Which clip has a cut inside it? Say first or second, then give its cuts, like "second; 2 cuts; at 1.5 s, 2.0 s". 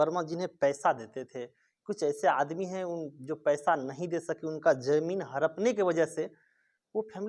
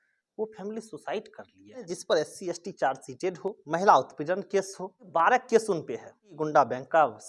second; 4 cuts; at 1.9 s, 3.6 s, 5.0 s, 6.3 s